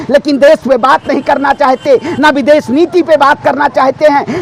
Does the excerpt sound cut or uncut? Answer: uncut